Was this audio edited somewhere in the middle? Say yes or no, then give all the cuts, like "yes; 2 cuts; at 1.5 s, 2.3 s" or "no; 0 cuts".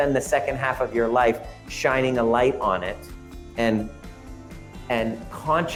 no; 0 cuts